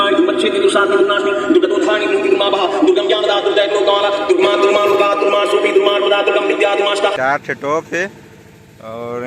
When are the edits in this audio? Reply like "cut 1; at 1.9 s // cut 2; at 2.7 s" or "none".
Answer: cut 1; at 7.1 s